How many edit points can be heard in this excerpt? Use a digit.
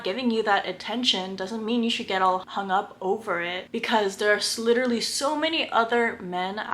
1